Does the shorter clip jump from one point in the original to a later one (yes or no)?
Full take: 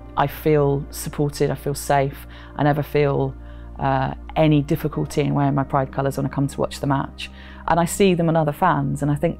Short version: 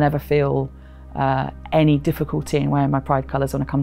no